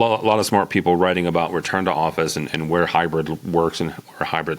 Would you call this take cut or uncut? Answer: uncut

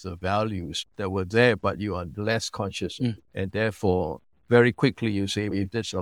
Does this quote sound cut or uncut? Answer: uncut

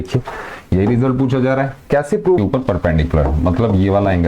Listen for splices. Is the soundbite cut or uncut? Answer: cut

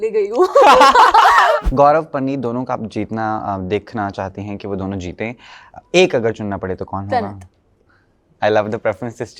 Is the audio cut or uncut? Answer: cut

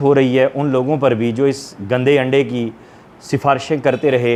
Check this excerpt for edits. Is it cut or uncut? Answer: uncut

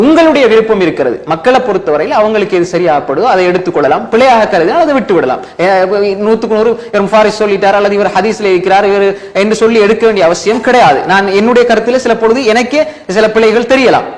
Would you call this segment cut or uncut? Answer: uncut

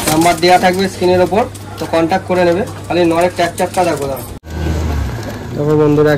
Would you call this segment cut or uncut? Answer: cut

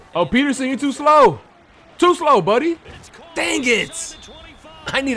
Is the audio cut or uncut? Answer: uncut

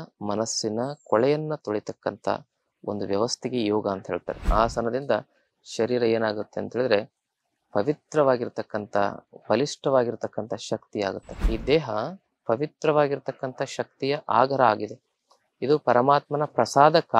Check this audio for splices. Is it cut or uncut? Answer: cut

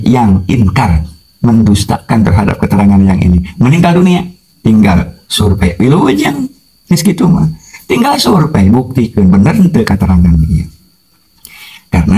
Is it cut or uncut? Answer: uncut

